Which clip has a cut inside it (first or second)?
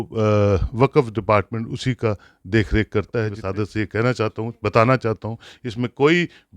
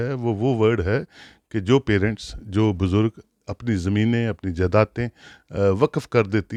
first